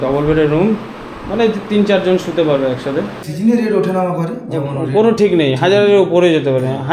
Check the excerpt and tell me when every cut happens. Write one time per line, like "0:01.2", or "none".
0:03.2